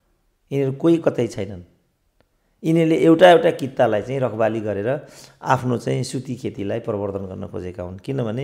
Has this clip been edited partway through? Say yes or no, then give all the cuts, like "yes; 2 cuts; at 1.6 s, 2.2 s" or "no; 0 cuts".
no; 0 cuts